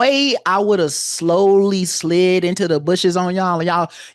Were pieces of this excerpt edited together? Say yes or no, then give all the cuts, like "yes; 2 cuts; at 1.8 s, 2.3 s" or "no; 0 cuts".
no; 0 cuts